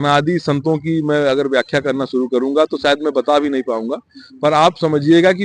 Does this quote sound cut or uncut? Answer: uncut